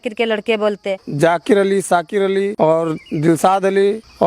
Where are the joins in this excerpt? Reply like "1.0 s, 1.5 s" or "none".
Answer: 0.9 s, 2.5 s